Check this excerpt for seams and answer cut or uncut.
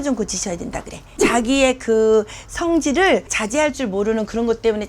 cut